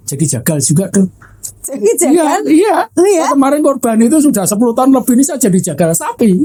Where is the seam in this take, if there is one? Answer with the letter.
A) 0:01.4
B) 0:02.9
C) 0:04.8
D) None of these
D